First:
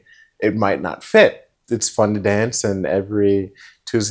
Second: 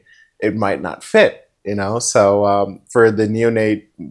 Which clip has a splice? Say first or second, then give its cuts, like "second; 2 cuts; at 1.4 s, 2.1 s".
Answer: first; 1 cut; at 1.5 s